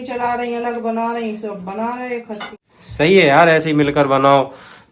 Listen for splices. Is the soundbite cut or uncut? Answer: cut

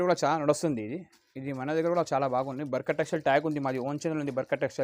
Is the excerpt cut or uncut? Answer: uncut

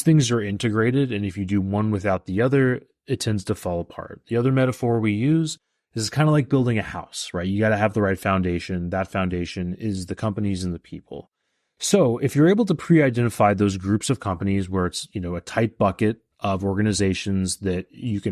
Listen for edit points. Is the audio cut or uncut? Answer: uncut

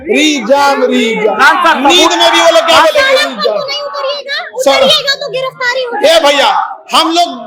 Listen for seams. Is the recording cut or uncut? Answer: uncut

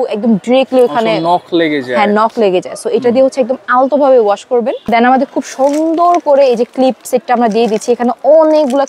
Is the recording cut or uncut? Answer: cut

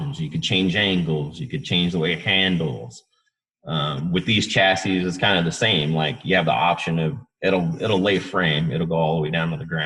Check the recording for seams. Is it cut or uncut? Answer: uncut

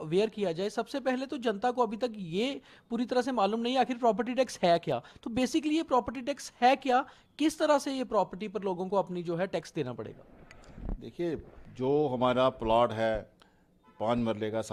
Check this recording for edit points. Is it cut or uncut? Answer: uncut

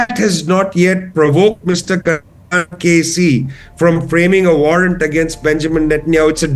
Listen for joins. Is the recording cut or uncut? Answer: uncut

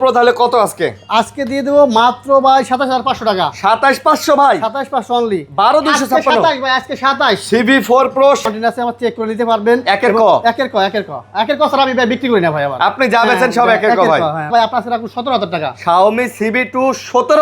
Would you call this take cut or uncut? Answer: cut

